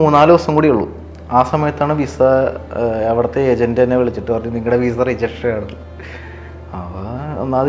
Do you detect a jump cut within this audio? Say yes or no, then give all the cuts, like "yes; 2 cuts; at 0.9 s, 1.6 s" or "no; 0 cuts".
no; 0 cuts